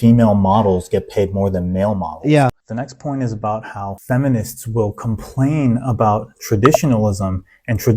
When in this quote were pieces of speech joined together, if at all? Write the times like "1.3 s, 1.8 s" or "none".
2.7 s